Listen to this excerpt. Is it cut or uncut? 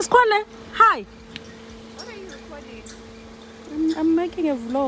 uncut